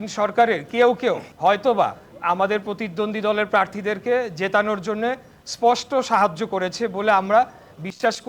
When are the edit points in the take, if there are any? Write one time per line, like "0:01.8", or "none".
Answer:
0:01.3
0:02.1